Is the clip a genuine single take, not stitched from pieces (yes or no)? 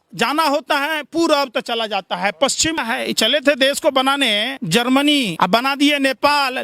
no